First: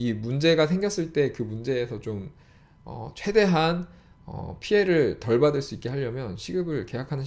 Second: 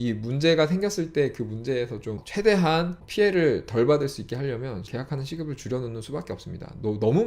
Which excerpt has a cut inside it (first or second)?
second